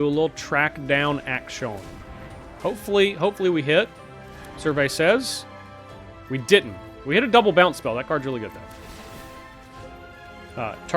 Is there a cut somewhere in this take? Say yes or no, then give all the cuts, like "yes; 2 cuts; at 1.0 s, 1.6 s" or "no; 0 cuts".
yes; 1 cut; at 2.5 s